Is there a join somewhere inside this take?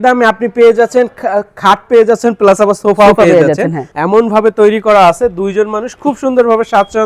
yes; 1 cut; at 3.8 s

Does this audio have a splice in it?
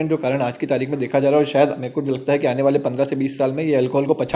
no; 0 cuts

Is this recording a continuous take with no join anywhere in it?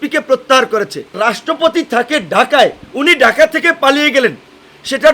no; 2 cuts; at 1.1 s, 2.8 s

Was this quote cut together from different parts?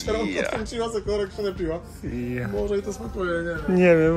no; 0 cuts

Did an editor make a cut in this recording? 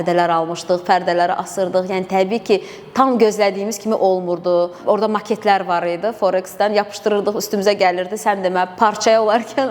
no; 0 cuts

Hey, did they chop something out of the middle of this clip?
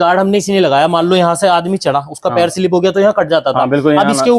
no; 0 cuts

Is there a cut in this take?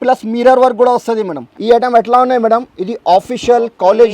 yes; 1 cut; at 1.5 s

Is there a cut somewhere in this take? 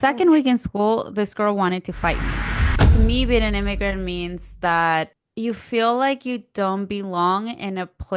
yes; 1 cut; at 2.8 s

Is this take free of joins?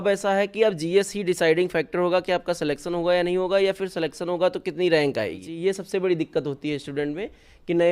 no; 1 cut; at 5.5 s

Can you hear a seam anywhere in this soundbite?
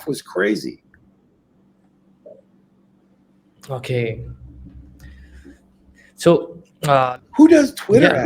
yes; 1 cut; at 7.0 s

